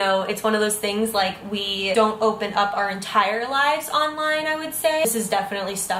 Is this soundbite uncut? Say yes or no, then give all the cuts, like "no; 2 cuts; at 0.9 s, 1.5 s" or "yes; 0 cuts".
yes; 0 cuts